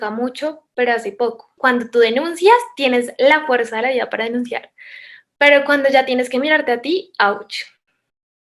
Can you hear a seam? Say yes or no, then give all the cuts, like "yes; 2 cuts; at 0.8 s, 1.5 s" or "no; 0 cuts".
yes; 1 cut; at 1.5 s